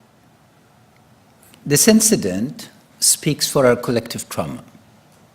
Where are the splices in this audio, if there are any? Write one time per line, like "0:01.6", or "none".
0:03.3